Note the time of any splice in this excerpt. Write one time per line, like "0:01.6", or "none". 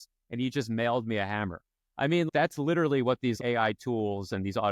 0:02.3
0:03.4